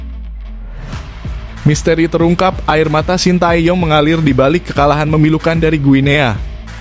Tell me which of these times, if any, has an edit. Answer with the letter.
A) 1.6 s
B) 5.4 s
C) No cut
A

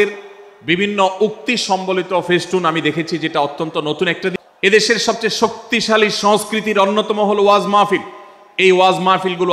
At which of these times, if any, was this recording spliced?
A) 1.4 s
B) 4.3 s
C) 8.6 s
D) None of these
B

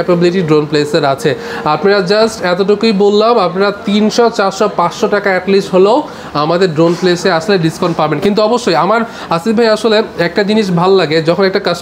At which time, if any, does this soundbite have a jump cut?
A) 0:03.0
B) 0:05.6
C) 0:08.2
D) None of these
D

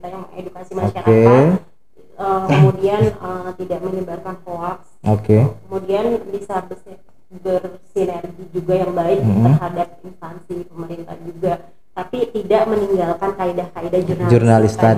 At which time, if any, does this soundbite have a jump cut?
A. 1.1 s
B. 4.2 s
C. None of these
C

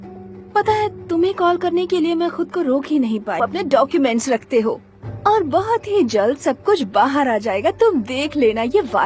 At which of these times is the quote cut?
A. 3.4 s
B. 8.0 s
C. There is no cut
A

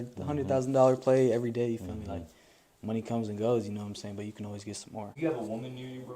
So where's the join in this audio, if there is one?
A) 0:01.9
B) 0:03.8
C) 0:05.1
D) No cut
C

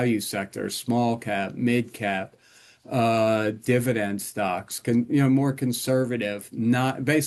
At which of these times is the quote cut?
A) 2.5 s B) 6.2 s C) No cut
C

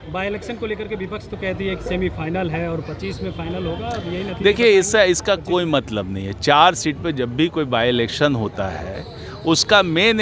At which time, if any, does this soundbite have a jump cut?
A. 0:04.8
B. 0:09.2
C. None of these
C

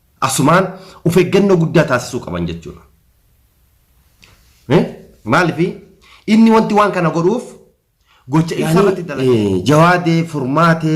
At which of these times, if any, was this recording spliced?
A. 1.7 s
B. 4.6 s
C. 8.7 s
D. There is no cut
C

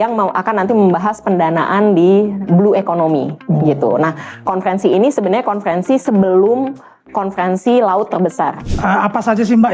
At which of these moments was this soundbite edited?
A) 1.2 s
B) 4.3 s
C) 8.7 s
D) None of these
C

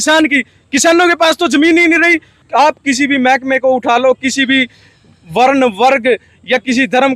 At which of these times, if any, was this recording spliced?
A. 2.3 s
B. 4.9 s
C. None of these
A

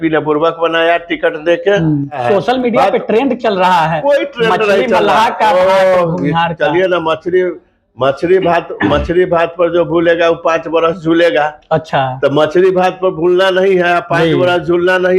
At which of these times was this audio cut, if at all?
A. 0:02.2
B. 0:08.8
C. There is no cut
A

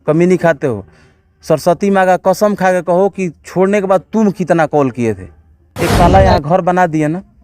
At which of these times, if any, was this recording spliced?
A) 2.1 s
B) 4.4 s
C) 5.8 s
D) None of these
C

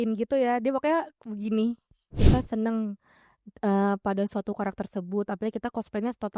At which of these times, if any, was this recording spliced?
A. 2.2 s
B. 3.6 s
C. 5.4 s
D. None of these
A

